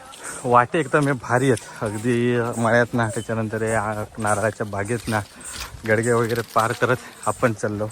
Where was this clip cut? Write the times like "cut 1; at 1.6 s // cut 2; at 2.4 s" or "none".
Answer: none